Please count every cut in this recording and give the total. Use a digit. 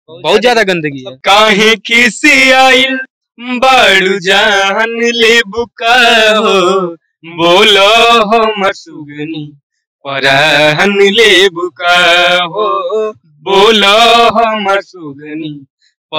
1